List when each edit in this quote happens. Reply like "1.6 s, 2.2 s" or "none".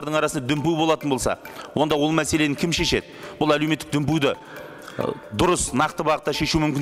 none